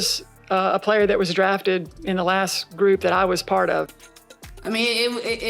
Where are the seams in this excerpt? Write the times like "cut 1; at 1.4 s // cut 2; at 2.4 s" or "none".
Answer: cut 1; at 3.9 s